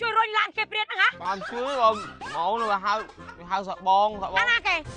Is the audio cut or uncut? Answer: cut